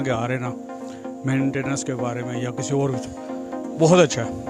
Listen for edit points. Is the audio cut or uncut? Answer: uncut